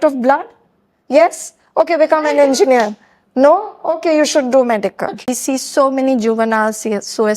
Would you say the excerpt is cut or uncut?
cut